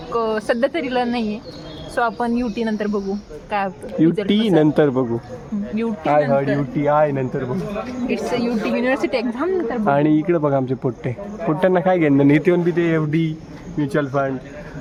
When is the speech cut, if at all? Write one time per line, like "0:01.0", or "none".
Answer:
none